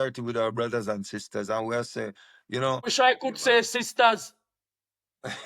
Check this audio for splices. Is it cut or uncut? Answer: cut